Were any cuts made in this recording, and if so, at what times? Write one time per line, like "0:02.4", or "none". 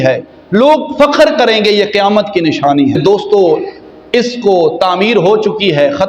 0:03.0